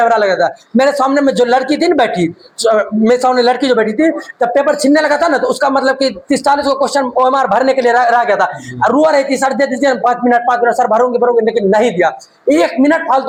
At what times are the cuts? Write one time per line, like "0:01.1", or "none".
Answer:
none